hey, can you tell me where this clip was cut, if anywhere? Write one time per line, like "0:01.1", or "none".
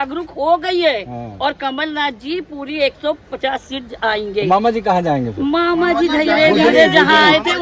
none